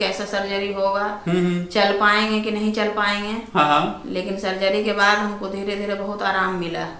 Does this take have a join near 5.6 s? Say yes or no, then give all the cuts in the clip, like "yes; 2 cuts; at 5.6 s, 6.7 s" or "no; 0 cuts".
no; 0 cuts